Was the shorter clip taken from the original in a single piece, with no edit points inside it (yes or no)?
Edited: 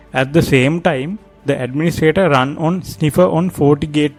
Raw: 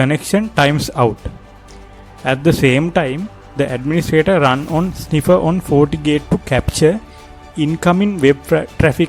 yes